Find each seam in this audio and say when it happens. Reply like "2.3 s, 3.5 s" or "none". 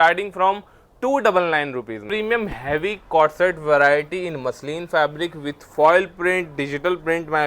2.0 s